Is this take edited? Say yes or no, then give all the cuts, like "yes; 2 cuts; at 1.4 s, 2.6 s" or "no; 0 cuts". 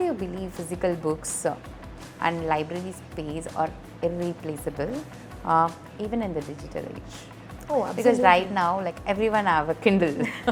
no; 0 cuts